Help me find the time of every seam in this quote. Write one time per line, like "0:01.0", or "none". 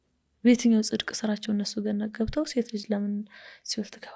none

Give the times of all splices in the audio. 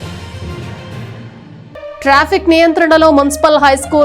0:02.0

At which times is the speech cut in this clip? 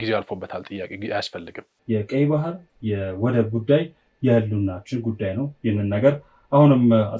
0:01.7

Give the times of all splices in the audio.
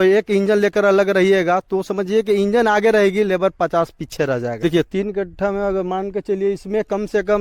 0:04.5

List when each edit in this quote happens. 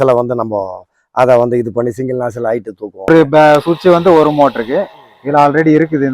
0:03.1

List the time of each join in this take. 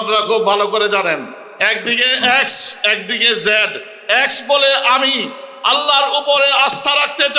none

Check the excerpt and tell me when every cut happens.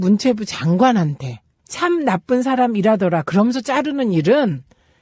none

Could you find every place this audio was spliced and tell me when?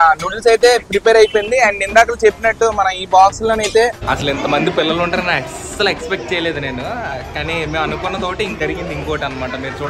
0:04.0
0:08.5

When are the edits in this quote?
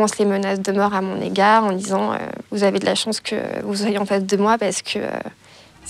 0:02.4

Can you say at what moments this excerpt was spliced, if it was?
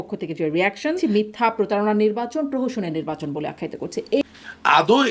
0:01.0
0:04.2

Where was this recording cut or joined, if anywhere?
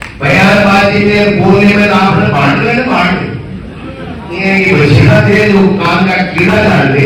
none

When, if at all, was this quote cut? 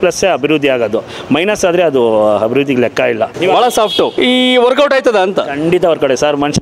0:03.3
0:04.1

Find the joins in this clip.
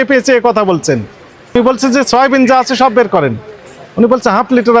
0:01.6

